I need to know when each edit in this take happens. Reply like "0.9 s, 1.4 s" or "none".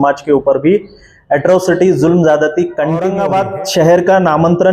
3.1 s

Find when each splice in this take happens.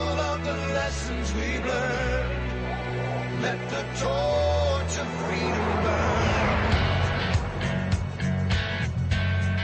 none

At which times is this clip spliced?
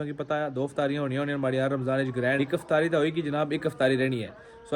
2.4 s

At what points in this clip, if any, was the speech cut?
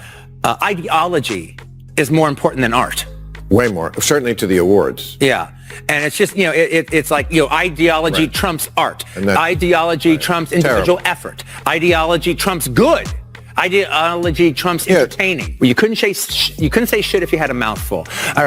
15.4 s

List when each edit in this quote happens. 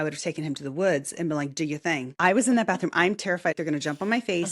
2.1 s, 3.6 s

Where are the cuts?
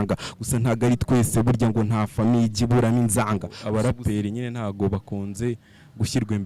3.5 s

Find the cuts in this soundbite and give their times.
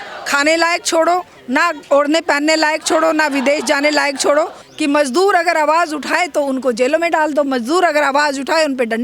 4.6 s

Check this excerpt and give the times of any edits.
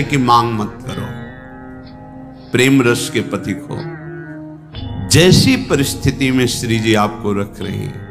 none

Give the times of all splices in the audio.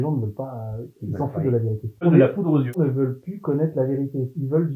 2.0 s, 2.8 s

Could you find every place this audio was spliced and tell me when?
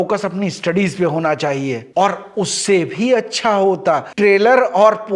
1.8 s, 4.1 s

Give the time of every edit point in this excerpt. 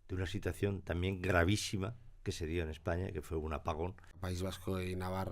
4.1 s

